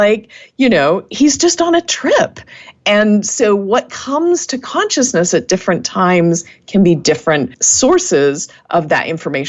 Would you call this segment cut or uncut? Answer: cut